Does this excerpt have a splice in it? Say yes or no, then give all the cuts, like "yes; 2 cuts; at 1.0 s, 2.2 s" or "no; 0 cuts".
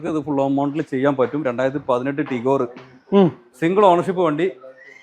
no; 0 cuts